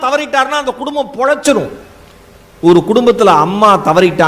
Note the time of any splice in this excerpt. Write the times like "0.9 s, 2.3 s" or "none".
none

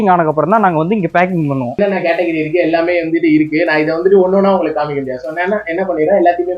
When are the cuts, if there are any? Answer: 1.8 s

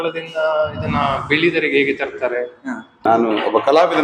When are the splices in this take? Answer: 3.0 s

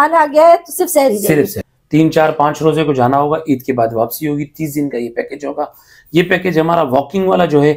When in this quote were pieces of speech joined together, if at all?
1.7 s

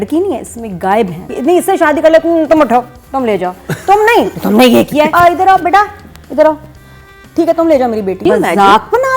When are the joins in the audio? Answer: 1.3 s, 5.1 s, 8.2 s

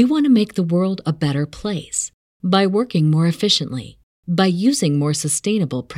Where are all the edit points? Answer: none

